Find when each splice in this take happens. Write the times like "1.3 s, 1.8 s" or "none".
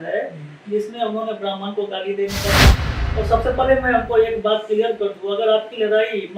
2.8 s